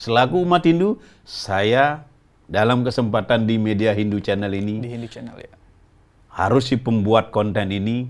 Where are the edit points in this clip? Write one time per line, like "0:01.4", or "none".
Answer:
none